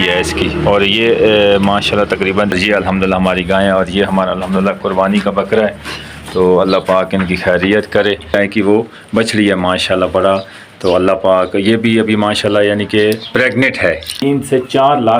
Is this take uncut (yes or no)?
no